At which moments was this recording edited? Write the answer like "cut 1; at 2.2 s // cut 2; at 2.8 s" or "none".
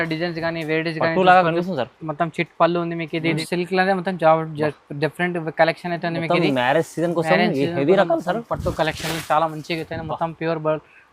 cut 1; at 3.4 s